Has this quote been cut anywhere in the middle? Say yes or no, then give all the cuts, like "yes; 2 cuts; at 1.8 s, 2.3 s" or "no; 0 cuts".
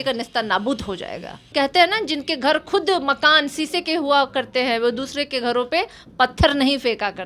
yes; 1 cut; at 1.5 s